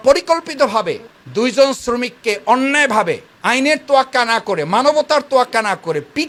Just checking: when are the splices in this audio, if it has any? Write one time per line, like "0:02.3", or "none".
none